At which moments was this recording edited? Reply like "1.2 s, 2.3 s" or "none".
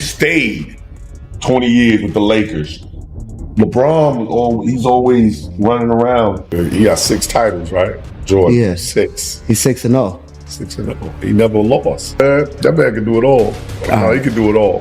6.4 s, 12.1 s